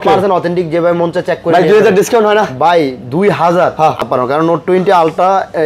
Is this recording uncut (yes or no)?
no